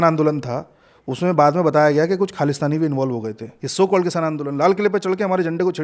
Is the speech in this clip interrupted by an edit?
yes; 1 cut; at 3.6 s

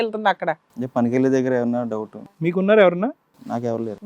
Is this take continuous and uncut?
no; 1 cut; at 2.4 s

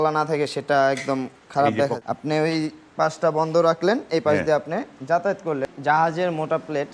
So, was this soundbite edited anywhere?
yes; 2 cuts; at 1.9 s, 5.7 s

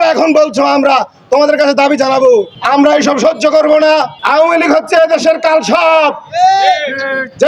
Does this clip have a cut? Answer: yes; 2 cuts; at 2.5 s, 4.2 s

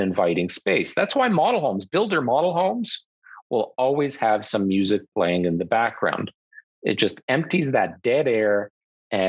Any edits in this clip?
no; 0 cuts

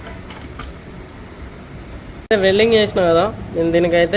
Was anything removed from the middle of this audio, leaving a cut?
yes; 1 cut; at 2.3 s

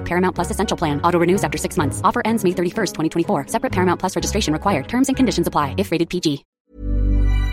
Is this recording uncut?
no; 1 cut; at 6.5 s

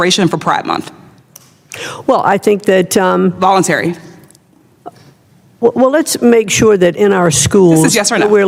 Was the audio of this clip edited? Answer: no; 0 cuts

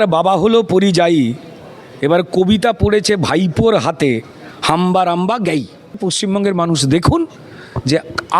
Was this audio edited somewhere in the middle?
yes; 1 cut; at 6.0 s

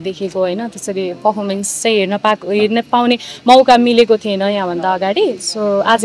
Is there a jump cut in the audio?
no; 0 cuts

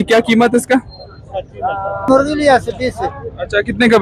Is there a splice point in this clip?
yes; 1 cut; at 2.1 s

